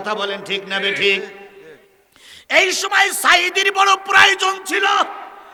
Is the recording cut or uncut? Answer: uncut